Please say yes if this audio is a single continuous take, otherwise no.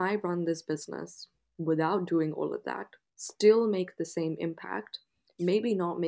yes